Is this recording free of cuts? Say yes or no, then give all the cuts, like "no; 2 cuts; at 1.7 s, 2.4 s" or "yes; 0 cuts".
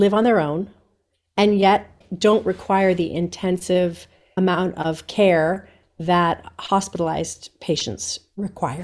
yes; 0 cuts